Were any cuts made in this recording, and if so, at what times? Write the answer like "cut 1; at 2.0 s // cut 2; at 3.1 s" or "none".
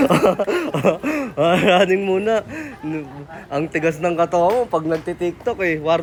none